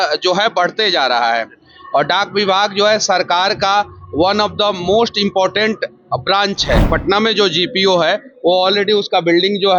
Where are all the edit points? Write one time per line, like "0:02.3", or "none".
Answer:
0:06.9